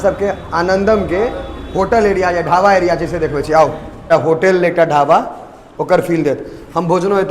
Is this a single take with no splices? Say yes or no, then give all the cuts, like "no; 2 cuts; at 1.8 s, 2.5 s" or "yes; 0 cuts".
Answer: no; 1 cut; at 4.0 s